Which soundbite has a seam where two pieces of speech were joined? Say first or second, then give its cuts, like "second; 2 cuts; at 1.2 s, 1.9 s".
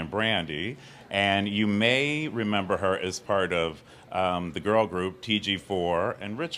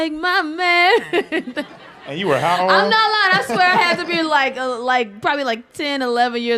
first; 1 cut; at 3.7 s